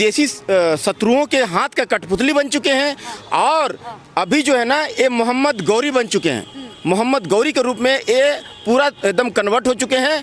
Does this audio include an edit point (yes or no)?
no